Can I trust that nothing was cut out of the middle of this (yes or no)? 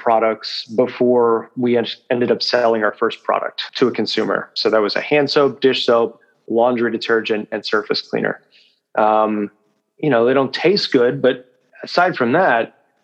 no